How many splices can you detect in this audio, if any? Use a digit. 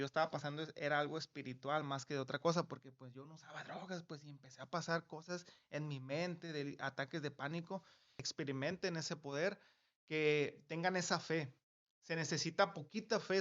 1